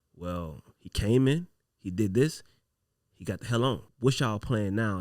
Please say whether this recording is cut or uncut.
cut